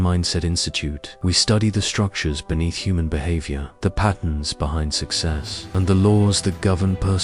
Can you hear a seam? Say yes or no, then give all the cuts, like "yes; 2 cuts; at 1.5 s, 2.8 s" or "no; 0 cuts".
no; 0 cuts